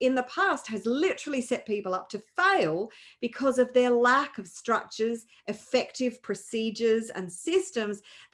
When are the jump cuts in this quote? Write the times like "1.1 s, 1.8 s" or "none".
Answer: none